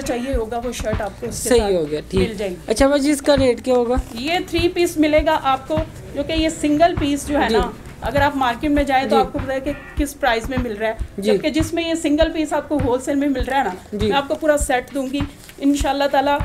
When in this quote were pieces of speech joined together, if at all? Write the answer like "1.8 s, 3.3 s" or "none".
none